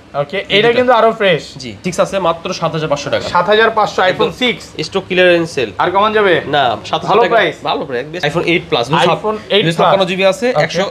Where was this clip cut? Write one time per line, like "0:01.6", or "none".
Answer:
0:01.9
0:08.3